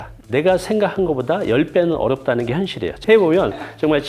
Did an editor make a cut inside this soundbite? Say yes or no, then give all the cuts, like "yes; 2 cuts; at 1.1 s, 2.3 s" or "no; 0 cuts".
yes; 1 cut; at 3.0 s